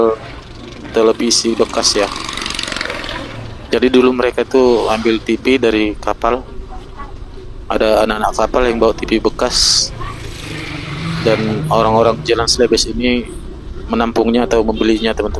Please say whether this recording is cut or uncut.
uncut